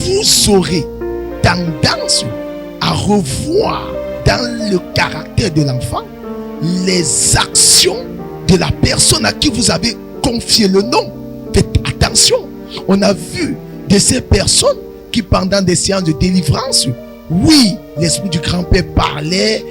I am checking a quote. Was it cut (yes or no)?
no